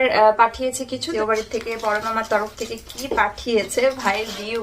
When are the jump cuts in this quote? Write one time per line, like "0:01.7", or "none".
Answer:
0:01.1